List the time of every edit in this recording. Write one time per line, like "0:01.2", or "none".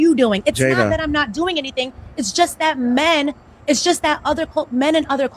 0:04.0